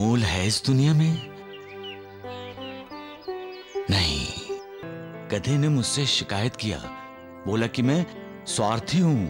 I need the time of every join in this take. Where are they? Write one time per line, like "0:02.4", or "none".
0:04.8